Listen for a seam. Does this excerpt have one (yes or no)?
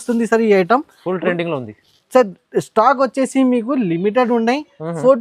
no